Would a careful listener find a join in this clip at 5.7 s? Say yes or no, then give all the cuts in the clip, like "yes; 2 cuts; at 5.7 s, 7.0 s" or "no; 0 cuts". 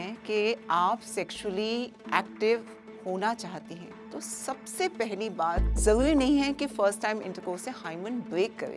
yes; 1 cut; at 5.7 s